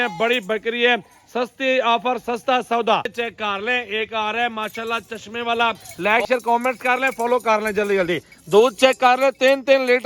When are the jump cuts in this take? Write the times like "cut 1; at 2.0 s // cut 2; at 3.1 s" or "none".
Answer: cut 1; at 3.1 s // cut 2; at 5.9 s